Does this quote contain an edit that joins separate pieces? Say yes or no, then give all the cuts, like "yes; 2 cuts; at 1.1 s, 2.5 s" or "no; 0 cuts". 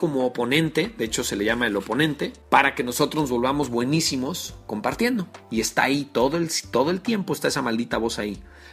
yes; 2 cuts; at 2.4 s, 5.4 s